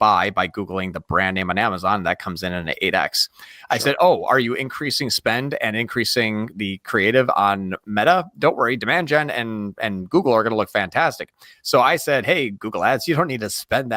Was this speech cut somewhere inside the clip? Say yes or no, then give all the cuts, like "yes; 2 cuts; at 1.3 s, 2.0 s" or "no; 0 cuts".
no; 0 cuts